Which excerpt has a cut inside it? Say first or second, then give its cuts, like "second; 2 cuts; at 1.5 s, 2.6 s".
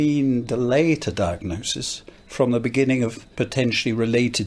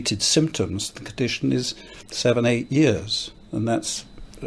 first; 1 cut; at 3.2 s